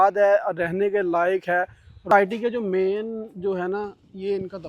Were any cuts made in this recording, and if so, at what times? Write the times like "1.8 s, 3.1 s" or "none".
2.1 s